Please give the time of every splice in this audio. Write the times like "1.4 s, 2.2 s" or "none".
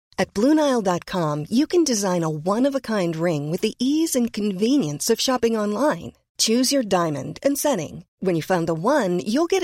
none